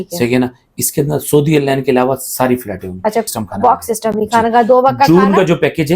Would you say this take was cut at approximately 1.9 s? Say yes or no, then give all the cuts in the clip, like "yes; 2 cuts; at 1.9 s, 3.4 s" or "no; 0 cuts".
no; 1 cut; at 3.2 s